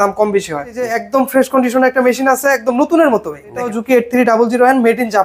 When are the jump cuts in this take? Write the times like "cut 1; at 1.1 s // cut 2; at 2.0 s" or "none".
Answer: cut 1; at 1.0 s // cut 2; at 3.8 s